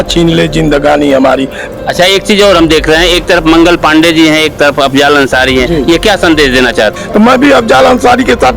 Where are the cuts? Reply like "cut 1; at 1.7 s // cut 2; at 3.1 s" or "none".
cut 1; at 1.6 s // cut 2; at 6.9 s